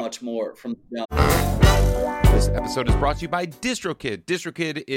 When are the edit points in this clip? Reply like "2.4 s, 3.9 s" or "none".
1.1 s